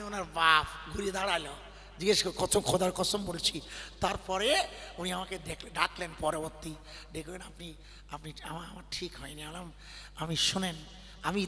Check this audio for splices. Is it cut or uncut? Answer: uncut